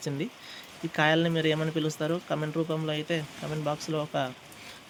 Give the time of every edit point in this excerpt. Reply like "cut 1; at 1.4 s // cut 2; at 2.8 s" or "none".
none